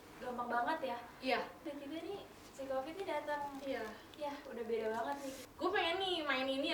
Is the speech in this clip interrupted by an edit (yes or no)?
yes